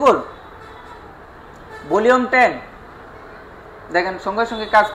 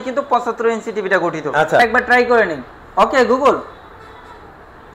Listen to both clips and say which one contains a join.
second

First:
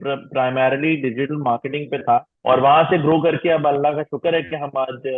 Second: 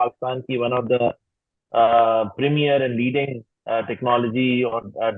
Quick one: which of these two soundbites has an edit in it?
first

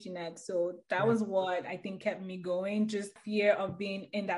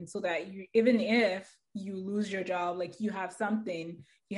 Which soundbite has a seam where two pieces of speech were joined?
first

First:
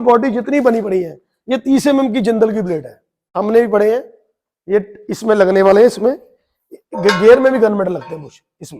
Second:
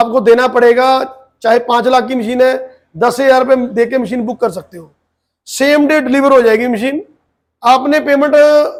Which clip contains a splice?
first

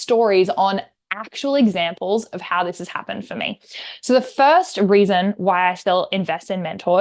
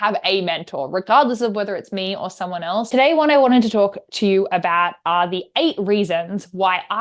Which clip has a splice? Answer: second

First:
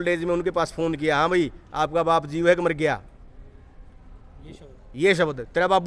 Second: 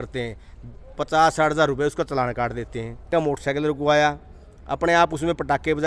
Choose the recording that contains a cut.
second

